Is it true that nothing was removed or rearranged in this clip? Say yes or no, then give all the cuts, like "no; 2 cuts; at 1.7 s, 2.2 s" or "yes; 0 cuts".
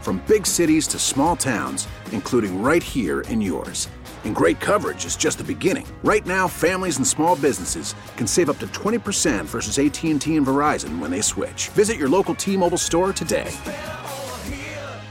yes; 0 cuts